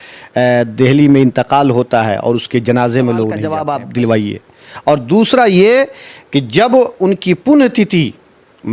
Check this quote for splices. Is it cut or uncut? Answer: cut